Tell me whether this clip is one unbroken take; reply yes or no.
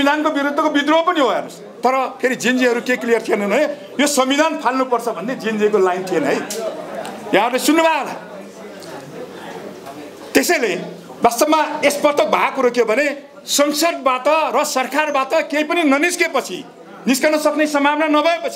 yes